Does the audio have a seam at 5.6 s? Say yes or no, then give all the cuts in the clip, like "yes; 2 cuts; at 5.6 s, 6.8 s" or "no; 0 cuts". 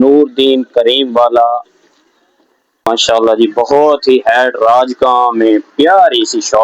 no; 1 cut; at 2.8 s